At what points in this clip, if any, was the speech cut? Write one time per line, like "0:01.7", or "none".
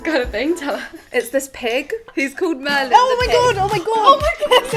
0:02.1